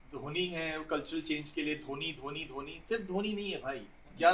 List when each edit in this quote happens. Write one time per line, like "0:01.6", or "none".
none